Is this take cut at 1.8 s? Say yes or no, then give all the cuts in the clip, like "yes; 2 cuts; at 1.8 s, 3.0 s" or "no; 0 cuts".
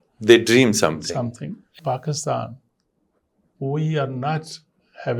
yes; 1 cut; at 1.8 s